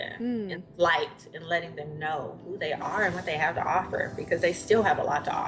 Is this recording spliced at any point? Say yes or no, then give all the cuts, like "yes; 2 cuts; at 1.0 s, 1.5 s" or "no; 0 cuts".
no; 0 cuts